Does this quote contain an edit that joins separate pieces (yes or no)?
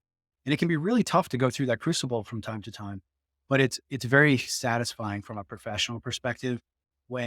no